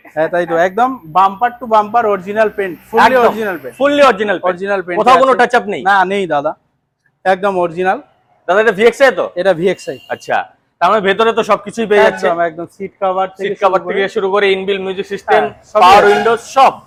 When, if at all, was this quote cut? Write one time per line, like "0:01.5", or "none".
none